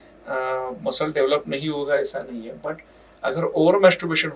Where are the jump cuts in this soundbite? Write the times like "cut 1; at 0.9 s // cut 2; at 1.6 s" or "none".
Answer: none